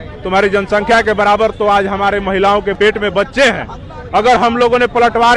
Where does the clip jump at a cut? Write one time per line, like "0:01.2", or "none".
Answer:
0:02.7

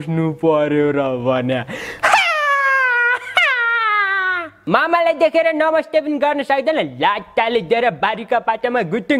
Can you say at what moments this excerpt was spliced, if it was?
0:04.5

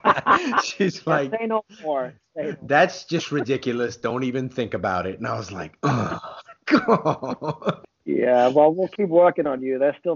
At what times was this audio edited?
0:07.9

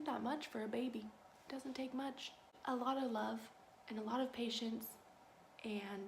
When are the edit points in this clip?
0:02.5

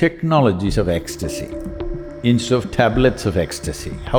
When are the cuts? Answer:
none

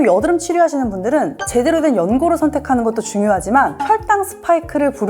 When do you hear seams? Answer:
none

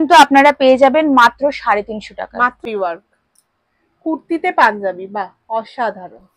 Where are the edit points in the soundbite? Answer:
0:02.6

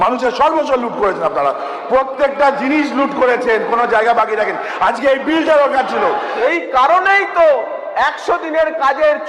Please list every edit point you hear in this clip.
0:05.8

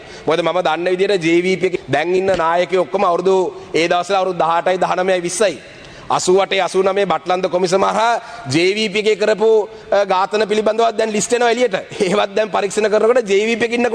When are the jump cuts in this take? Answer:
0:01.7

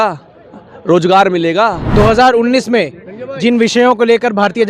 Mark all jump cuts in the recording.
0:01.8

